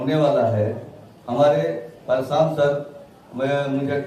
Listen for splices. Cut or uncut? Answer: uncut